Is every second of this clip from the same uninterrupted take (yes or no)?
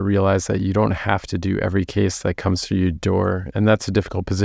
no